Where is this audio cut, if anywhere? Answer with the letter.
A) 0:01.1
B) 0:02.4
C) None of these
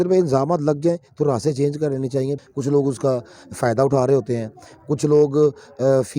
B